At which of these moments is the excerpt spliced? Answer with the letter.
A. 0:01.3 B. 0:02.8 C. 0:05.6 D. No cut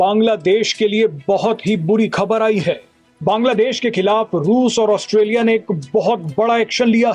D